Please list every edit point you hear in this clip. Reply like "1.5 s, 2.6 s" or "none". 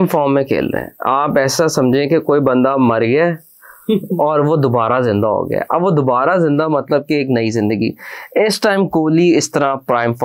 none